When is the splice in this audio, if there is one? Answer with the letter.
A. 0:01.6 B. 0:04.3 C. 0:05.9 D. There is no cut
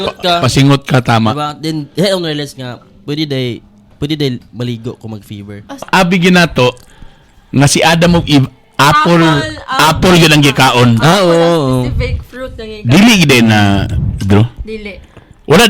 C